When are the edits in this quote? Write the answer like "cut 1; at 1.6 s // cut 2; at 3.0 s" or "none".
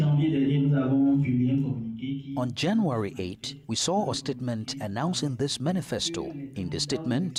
none